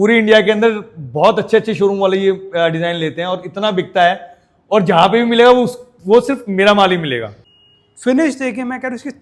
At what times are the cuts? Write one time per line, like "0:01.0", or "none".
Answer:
0:07.4